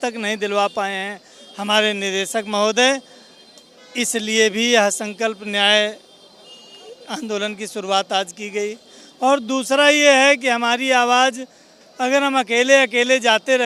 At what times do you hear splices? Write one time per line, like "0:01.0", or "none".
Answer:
none